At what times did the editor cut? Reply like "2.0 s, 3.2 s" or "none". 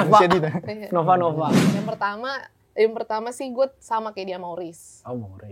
1.7 s